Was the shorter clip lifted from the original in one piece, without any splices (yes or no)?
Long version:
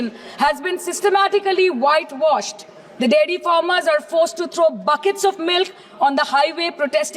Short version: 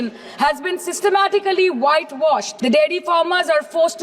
no